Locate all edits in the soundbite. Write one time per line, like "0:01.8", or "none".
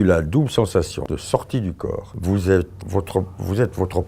0:01.0
0:02.1
0:02.8